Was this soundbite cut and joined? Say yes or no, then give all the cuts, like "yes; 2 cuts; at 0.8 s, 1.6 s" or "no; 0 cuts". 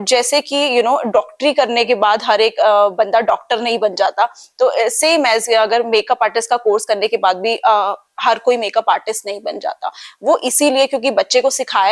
no; 0 cuts